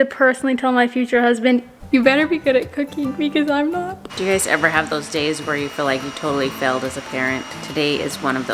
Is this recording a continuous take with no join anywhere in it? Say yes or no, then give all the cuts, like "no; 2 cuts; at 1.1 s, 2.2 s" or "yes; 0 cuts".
no; 2 cuts; at 4.1 s, 7.6 s